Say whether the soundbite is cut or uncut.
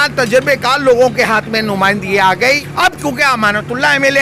cut